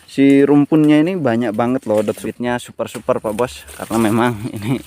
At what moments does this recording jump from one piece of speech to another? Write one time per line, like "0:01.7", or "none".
0:02.3